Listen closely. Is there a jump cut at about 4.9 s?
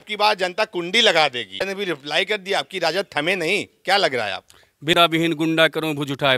yes; 2 cuts; at 1.6 s, 4.9 s

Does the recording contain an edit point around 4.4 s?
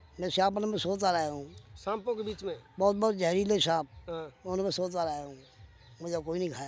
no; 0 cuts

